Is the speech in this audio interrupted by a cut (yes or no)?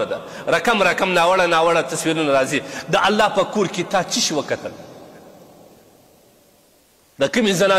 no